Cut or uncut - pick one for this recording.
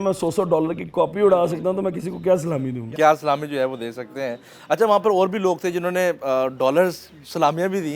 uncut